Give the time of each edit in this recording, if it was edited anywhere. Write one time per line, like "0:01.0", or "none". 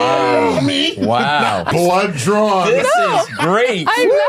0:01.7